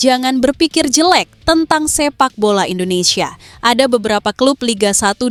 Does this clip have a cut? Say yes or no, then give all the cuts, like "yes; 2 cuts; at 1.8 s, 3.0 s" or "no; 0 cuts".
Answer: no; 0 cuts